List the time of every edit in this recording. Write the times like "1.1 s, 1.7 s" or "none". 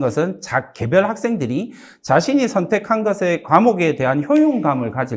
none